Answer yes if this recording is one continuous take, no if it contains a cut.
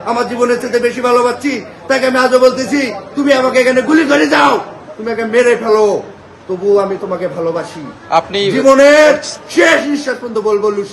yes